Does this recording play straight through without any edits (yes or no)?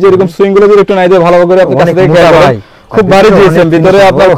yes